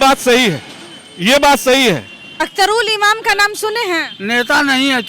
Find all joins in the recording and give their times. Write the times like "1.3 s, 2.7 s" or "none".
2.4 s